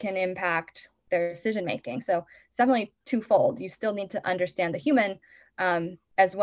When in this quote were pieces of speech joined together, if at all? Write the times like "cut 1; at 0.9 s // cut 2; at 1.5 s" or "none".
cut 1; at 1.4 s